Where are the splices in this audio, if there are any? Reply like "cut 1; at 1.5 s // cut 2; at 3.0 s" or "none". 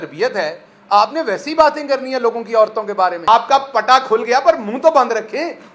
cut 1; at 3.3 s